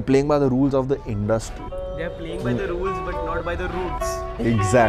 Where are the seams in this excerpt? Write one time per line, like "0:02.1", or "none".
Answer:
none